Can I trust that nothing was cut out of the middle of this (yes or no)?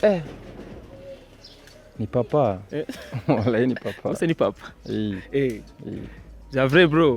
yes